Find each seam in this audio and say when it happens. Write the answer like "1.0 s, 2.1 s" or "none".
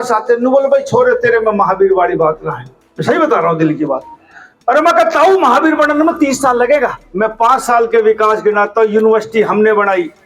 7.0 s